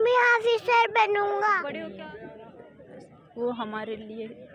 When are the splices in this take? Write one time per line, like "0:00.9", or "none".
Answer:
0:01.8